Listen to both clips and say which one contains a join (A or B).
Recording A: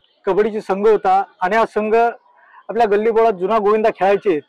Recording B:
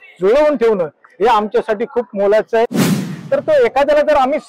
B